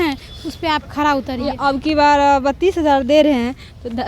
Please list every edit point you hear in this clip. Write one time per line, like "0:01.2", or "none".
0:01.5

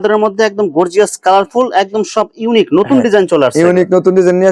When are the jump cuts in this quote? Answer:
none

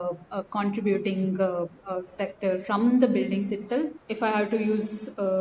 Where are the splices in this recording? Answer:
0:04.0

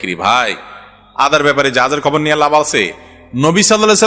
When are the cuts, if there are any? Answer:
none

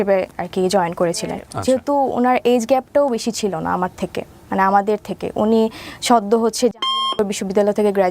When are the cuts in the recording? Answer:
0:01.5

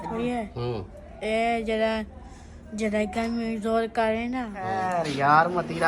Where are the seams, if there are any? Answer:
0:04.8

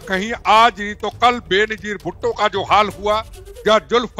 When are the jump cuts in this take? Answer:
none

